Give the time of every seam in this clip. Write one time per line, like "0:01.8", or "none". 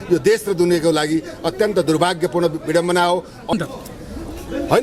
0:03.5